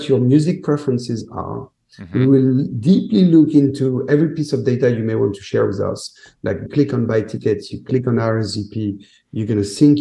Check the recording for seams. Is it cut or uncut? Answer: cut